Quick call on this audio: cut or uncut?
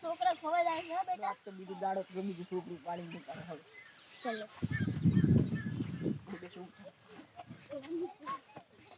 cut